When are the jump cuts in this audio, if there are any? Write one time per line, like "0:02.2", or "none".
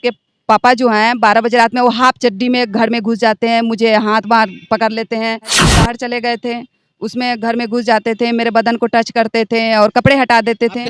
0:05.7

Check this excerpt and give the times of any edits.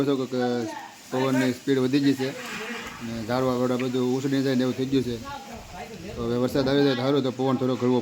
none

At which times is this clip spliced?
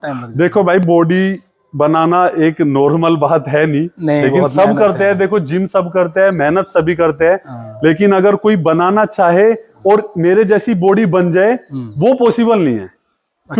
none

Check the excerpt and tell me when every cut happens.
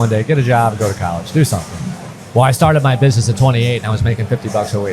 0:02.1

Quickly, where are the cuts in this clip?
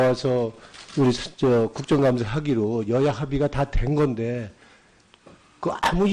0:02.6

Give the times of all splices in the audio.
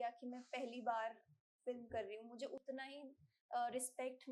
none

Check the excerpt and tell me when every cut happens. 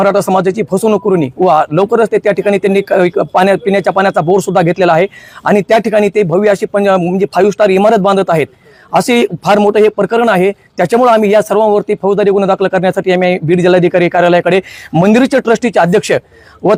none

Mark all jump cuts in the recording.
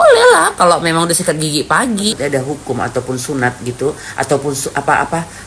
0:02.1

